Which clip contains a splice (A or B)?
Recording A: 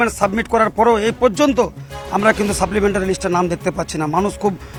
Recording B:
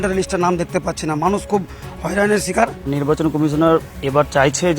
B